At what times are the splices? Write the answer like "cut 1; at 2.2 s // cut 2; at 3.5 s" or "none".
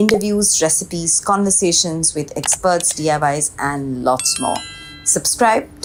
none